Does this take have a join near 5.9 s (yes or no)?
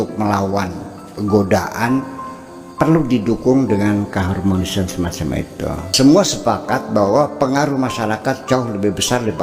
yes